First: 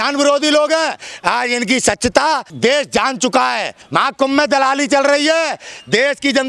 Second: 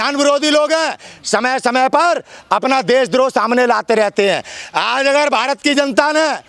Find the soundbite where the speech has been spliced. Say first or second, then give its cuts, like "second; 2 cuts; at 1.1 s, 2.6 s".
first; 3 cuts; at 1.1 s, 2.5 s, 3.8 s